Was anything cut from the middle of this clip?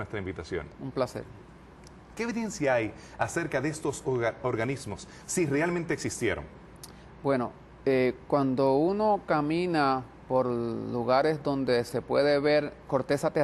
no; 0 cuts

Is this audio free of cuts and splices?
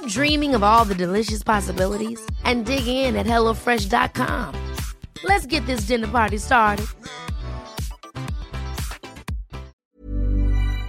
no; 1 cut; at 9.8 s

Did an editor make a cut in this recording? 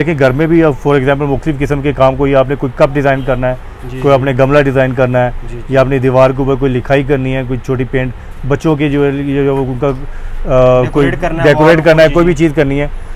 no; 0 cuts

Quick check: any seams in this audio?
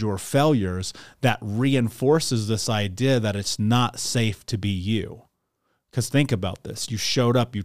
no; 0 cuts

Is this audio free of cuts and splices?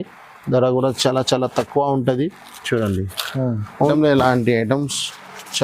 no; 1 cut; at 3.9 s

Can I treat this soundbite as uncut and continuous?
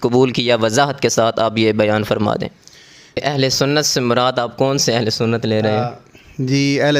no; 1 cut; at 3.2 s

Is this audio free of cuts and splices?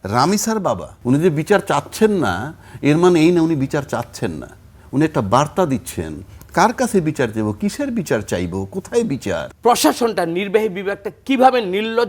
no; 2 cuts; at 0.9 s, 9.5 s

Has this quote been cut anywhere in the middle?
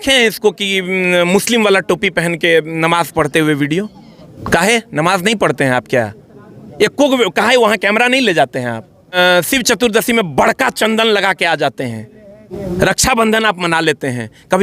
yes; 3 cuts; at 4.3 s, 9.2 s, 12.5 s

